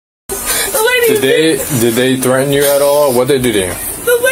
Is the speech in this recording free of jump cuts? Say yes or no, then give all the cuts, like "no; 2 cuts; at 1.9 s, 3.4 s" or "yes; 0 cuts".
yes; 0 cuts